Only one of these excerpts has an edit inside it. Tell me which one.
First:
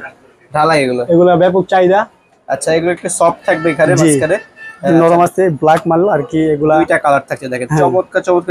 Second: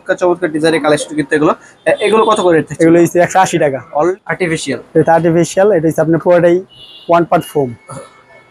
second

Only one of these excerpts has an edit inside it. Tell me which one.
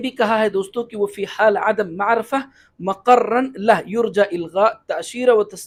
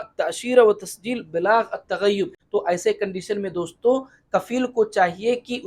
second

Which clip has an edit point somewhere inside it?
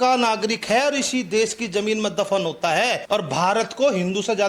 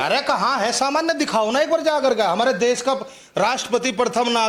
first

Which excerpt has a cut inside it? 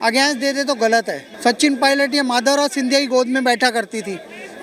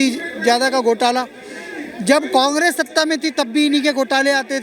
first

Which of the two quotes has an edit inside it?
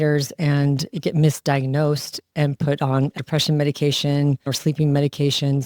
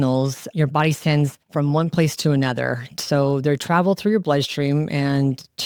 first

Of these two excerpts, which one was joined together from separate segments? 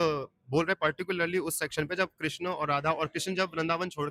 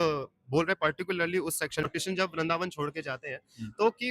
second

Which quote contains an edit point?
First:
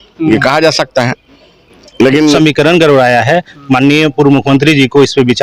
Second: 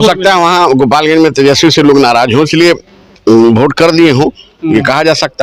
first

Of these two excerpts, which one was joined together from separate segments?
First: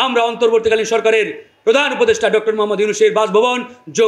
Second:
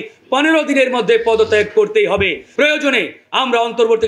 second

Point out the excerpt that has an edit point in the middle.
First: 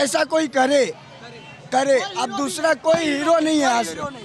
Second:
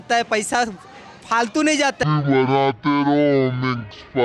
second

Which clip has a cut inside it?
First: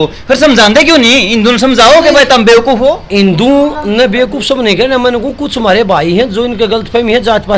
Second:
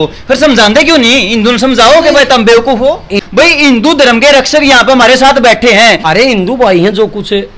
second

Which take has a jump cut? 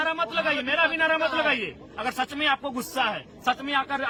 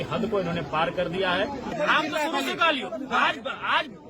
second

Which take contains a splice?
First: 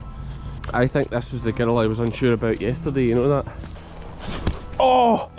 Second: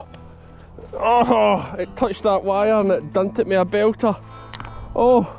first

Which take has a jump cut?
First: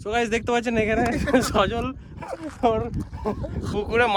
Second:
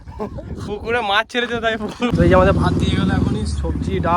second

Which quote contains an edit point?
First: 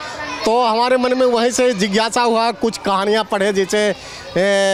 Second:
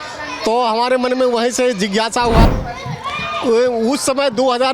second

